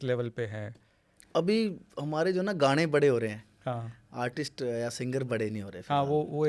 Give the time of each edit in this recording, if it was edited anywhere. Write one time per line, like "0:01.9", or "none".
none

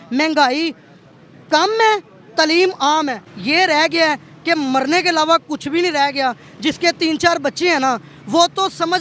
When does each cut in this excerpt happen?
0:03.3

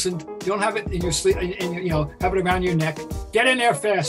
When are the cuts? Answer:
0:03.2

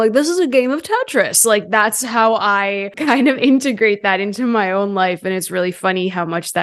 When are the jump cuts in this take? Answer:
0:02.9

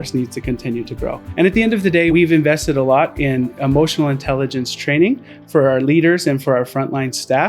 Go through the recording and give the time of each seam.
0:01.2
0:02.1

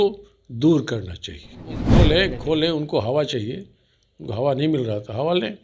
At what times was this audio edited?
0:01.8

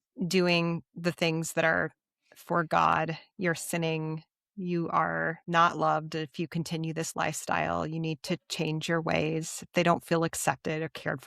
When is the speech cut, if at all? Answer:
0:05.4

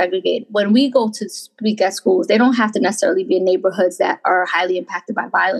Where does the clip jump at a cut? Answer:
none

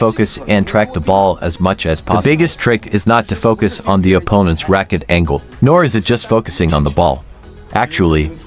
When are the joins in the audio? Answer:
none

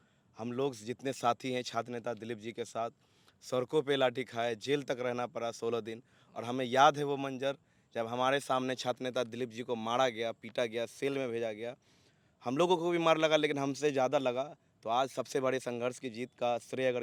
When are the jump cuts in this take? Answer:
none

